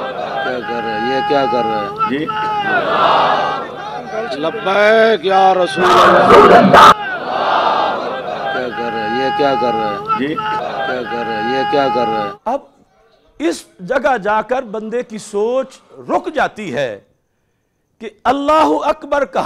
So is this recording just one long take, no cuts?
yes; 0 cuts

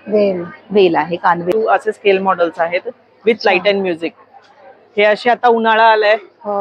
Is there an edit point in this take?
yes; 1 cut; at 1.5 s

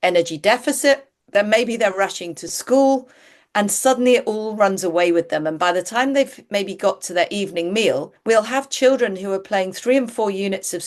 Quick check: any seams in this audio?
yes; 2 cuts; at 1.1 s, 8.1 s

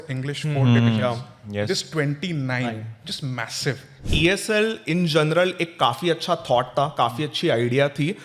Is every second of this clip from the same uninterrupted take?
no; 1 cut; at 4.1 s

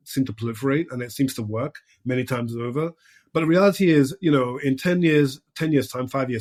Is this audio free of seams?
yes; 0 cuts

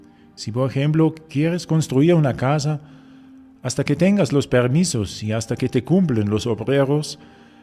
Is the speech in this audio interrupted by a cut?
no; 0 cuts

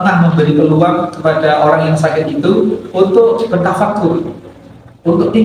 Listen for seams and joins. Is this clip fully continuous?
yes; 0 cuts

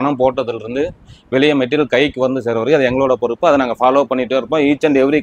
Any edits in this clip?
no; 0 cuts

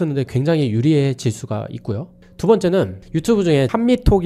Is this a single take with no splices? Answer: yes; 0 cuts

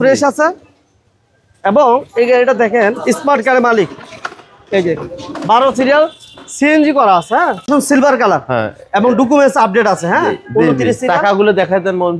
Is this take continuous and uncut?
no; 1 cut; at 7.7 s

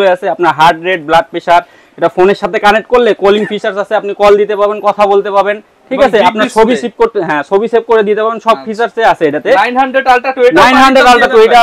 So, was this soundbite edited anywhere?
no; 0 cuts

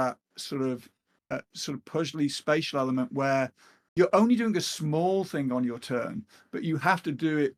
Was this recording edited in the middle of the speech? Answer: no; 0 cuts

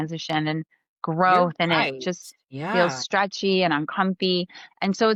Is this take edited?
no; 0 cuts

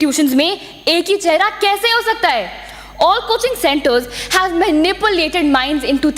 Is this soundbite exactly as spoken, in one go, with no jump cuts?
yes; 0 cuts

